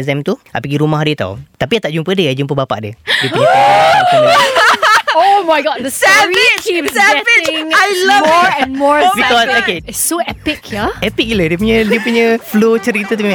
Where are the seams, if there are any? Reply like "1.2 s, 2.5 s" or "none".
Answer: 1.5 s, 9.8 s, 12.5 s